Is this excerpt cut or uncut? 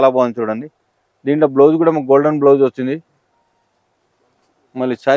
uncut